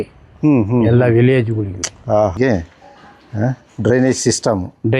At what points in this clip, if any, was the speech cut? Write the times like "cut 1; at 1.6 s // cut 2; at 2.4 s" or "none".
cut 1; at 2.4 s

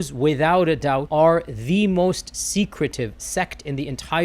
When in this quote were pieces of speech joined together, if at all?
cut 1; at 1.1 s

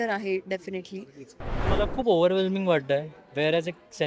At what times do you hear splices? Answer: cut 1; at 1.7 s

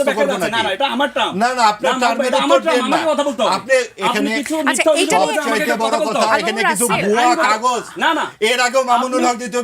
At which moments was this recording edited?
none

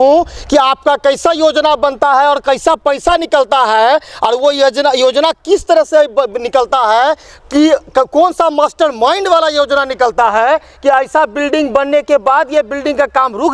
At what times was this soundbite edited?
none

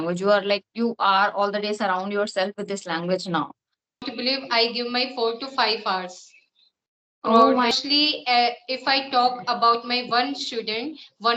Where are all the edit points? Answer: cut 1; at 4.1 s // cut 2; at 7.8 s

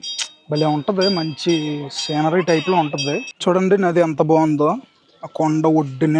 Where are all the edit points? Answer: cut 1; at 3.3 s

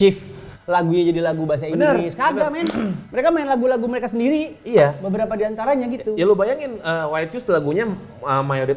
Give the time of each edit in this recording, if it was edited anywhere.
none

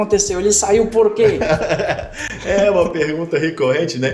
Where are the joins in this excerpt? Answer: none

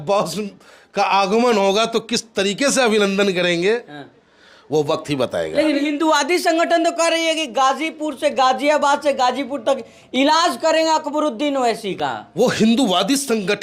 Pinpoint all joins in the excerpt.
cut 1; at 5.8 s

